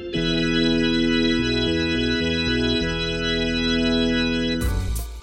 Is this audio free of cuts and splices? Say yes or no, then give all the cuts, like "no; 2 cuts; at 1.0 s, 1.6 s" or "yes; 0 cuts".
no; 1 cut; at 4.3 s